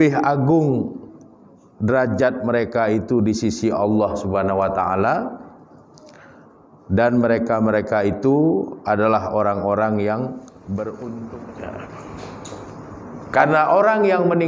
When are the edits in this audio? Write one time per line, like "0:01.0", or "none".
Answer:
0:11.2